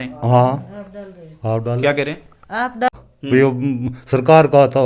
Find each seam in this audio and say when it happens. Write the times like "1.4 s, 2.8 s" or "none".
2.9 s